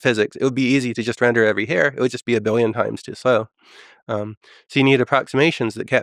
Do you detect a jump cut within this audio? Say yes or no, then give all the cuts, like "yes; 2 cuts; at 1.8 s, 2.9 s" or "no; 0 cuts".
no; 0 cuts